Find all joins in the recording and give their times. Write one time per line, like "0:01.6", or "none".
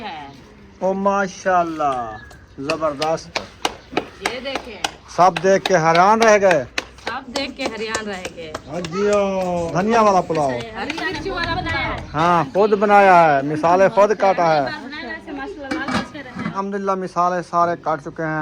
0:09.7
0:16.5